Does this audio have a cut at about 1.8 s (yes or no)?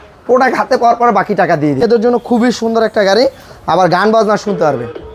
yes